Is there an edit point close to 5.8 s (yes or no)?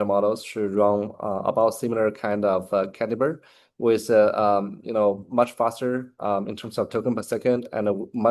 no